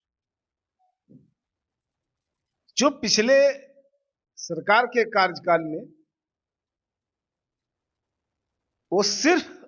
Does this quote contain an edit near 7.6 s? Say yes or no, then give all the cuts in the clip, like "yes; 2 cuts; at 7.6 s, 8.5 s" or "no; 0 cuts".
no; 0 cuts